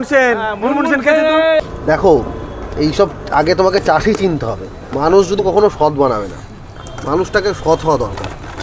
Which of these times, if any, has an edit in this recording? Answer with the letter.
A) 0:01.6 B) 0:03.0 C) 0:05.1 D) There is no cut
A